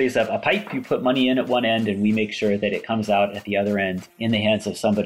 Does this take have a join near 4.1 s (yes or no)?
yes